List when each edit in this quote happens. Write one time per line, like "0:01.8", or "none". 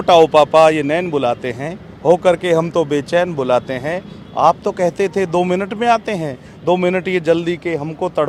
none

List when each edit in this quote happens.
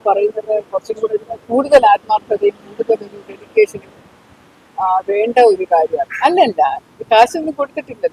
0:01.3
0:06.0

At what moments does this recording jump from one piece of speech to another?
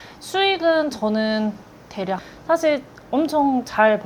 0:02.2

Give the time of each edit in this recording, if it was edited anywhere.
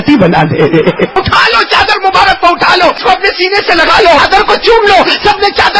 0:01.1
0:03.0
0:04.2

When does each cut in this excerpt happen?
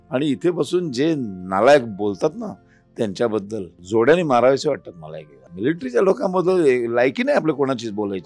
0:03.8
0:05.5

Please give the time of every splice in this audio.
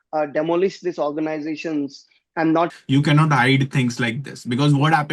0:02.8

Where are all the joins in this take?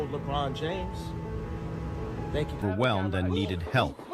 0:02.6

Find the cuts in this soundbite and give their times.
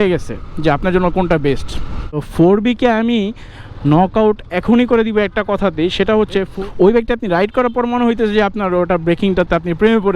0:02.3
0:06.5

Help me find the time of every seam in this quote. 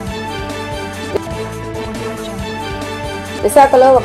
0:01.1
0:03.4

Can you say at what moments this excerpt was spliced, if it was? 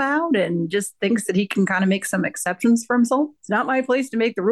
0:03.4

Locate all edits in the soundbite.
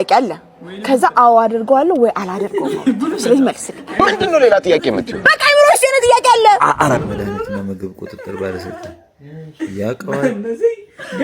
0:07.0

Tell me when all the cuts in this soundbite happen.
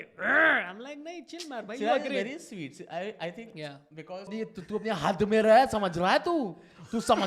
0:04.3

